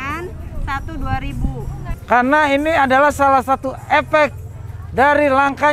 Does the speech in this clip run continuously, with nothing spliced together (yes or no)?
no